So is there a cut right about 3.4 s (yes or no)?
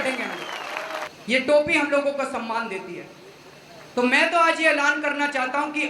no